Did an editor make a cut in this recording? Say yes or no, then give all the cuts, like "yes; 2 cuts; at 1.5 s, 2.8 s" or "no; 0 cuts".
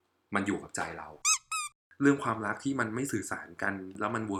yes; 1 cut; at 1.5 s